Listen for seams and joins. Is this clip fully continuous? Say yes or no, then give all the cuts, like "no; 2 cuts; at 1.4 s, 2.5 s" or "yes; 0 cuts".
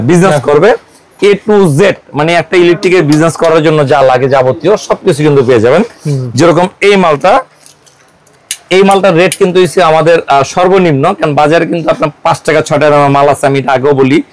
yes; 0 cuts